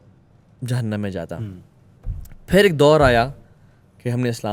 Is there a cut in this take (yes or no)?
no